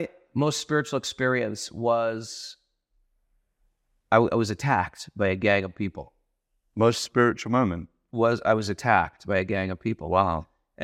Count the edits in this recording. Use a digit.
0